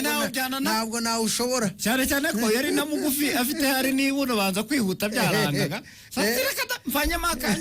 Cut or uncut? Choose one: uncut